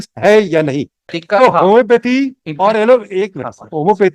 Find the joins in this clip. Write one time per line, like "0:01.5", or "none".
0:01.2

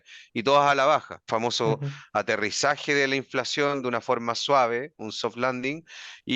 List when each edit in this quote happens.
0:01.2

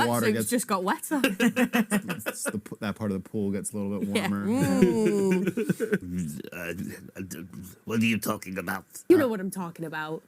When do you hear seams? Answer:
0:06.0
0:09.1

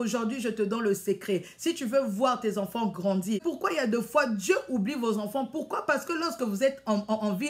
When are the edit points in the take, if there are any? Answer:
0:03.4

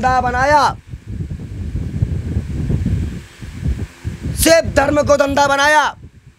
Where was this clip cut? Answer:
none

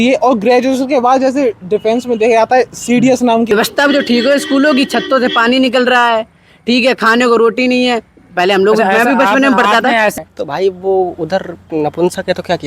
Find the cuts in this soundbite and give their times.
0:03.5
0:10.1

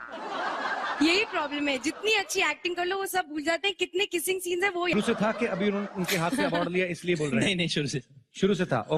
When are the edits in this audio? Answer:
0:04.9

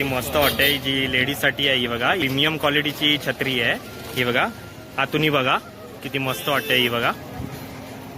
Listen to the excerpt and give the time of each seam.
0:02.2

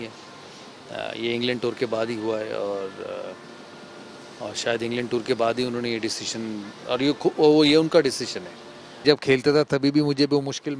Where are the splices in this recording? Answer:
0:09.0

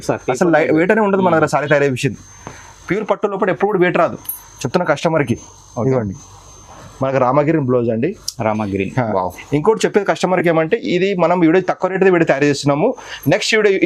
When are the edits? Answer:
none

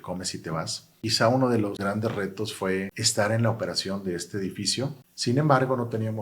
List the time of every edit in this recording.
0:00.9
0:01.8
0:03.0
0:05.1

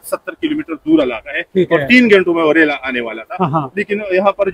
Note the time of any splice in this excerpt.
none

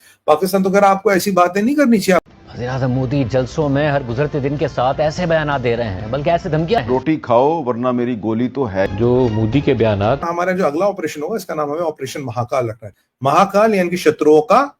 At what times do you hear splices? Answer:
0:02.2
0:10.2

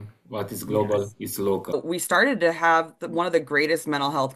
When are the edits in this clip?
0:01.7

